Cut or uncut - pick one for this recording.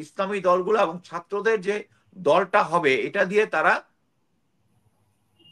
uncut